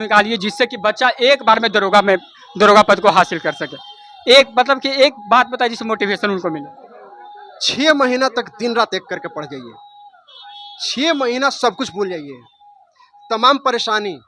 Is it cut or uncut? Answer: uncut